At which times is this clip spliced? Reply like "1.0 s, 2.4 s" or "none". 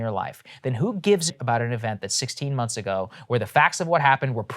1.4 s

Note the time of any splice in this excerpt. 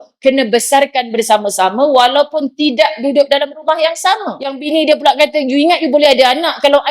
4.5 s

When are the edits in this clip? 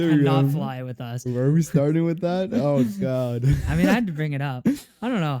none

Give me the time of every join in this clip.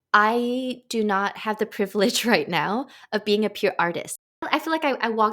4.2 s

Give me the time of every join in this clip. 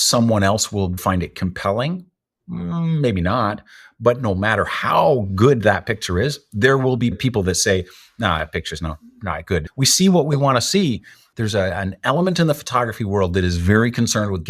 9.7 s, 11.2 s

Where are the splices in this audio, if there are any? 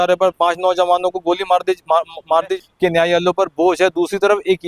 2.5 s

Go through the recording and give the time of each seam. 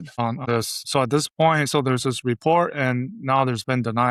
none

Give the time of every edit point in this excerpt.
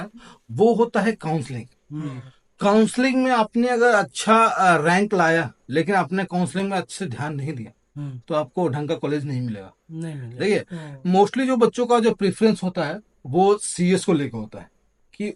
none

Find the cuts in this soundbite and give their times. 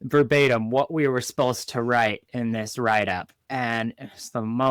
none

